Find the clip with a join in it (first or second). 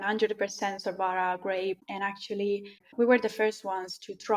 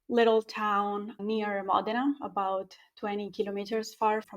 first